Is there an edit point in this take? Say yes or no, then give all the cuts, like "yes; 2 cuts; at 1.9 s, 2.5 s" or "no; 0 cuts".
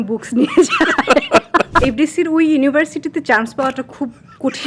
yes; 1 cut; at 1.8 s